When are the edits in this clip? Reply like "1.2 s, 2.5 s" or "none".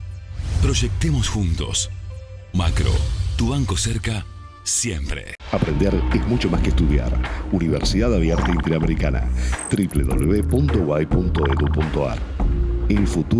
5.3 s